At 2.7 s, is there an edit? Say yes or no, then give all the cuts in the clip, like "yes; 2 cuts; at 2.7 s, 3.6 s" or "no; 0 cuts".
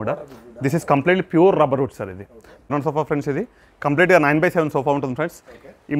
yes; 1 cut; at 2.7 s